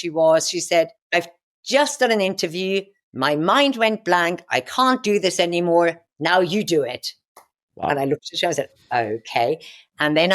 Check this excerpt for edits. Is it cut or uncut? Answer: cut